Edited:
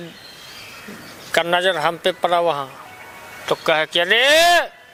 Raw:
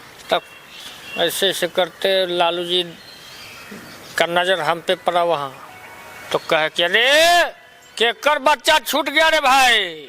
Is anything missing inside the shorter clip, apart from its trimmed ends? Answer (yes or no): no